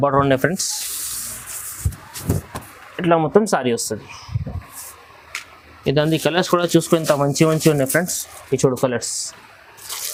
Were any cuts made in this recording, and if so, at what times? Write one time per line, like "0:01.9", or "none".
none